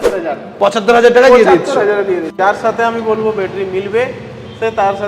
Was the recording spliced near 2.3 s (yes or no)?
yes